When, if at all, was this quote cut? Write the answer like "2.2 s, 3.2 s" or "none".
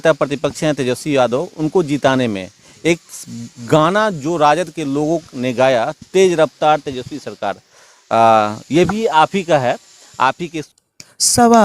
10.6 s